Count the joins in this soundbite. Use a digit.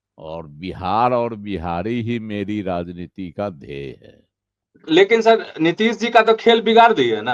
1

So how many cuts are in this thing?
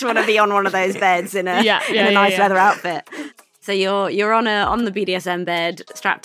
2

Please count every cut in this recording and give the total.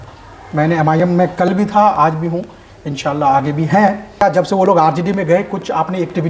1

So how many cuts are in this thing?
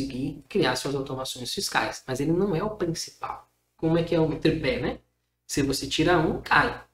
1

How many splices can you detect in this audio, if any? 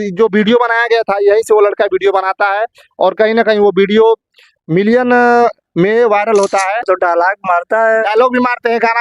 1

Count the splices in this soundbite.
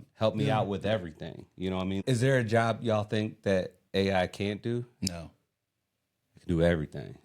1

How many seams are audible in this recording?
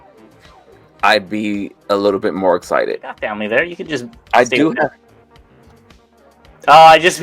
1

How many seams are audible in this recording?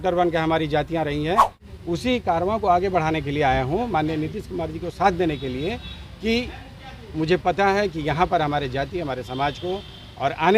1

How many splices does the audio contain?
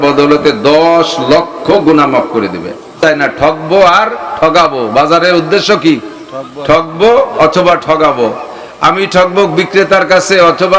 0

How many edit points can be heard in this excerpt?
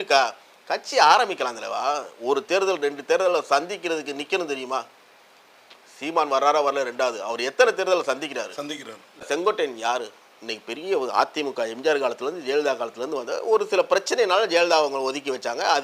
1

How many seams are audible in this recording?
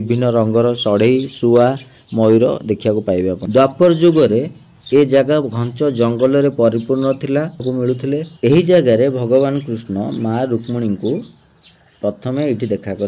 2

